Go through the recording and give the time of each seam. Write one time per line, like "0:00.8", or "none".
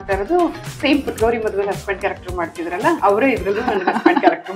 0:03.0